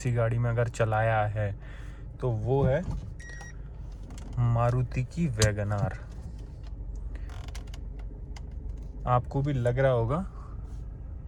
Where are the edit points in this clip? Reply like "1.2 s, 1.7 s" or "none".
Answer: none